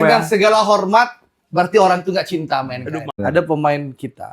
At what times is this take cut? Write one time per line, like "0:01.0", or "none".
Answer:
0:03.2

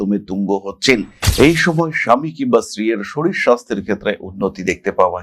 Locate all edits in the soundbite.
0:01.2

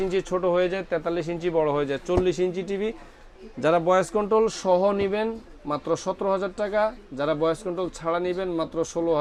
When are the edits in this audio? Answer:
none

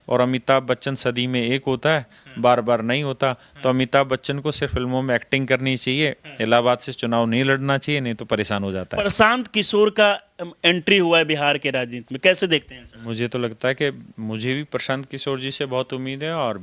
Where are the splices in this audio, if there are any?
0:09.1
0:13.0

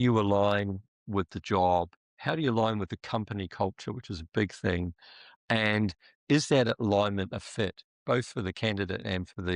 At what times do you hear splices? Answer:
none

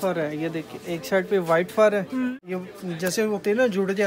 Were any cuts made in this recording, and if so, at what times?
0:02.4

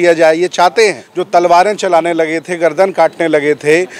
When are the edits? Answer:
0:01.1

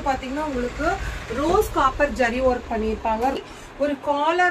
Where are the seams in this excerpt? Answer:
0:03.4

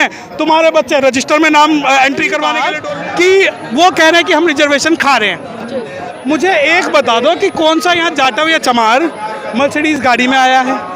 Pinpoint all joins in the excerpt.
0:02.7

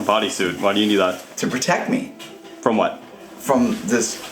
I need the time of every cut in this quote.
0:01.3

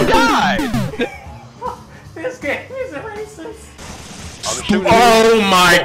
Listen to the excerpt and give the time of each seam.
0:03.8

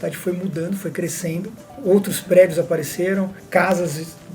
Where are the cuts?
0:01.6
0:03.4

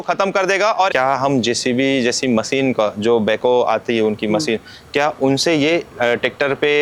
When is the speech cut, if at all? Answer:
0:00.9

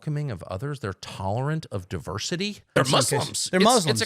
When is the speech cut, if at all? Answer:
0:02.8

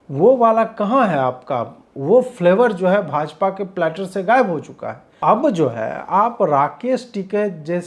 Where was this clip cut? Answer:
0:05.1

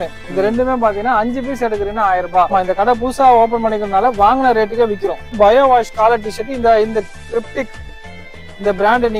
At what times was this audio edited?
0:02.5
0:05.3

